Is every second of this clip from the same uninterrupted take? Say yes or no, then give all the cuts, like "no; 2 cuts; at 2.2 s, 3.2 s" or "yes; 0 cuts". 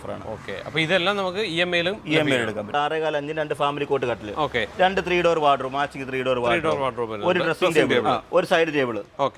no; 2 cuts; at 2.7 s, 7.9 s